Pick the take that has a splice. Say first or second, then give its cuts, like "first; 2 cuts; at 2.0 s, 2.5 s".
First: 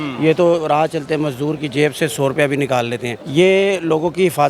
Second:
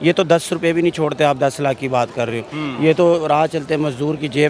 first; 1 cut; at 3.2 s